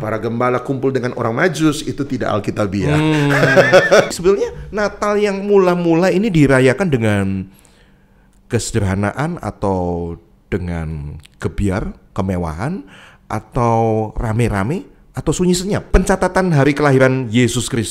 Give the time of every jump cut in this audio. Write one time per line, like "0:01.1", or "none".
0:04.1
0:15.8